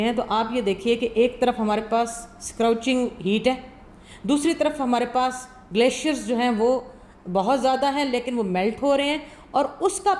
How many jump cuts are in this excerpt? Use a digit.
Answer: 0